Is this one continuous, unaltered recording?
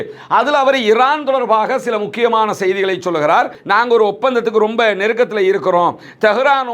no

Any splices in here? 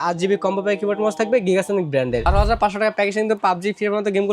yes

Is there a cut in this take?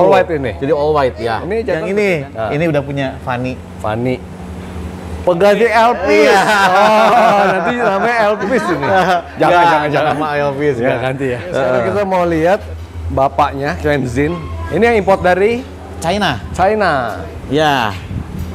yes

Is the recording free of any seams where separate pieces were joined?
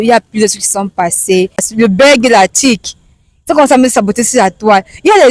no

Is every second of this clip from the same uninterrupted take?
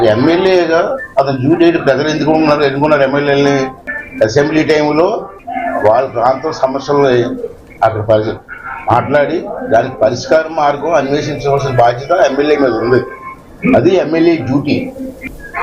no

